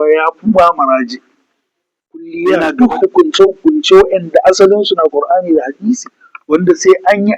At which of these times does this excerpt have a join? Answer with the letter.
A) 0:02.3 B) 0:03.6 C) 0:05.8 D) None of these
A